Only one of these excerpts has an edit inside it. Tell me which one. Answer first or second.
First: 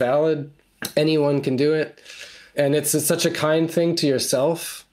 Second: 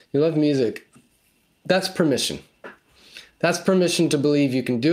first